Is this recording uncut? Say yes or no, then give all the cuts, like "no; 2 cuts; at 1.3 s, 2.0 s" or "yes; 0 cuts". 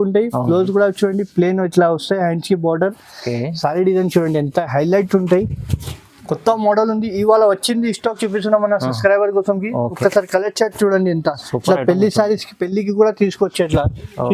yes; 0 cuts